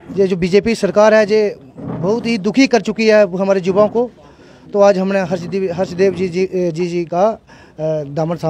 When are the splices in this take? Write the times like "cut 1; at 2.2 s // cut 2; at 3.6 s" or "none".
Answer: none